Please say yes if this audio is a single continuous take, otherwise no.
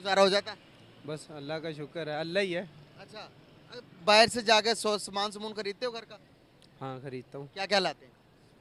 yes